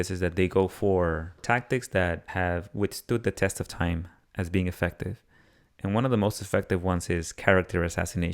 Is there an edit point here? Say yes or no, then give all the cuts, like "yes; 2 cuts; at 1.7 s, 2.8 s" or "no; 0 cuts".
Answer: yes; 2 cuts; at 1.4 s, 2.3 s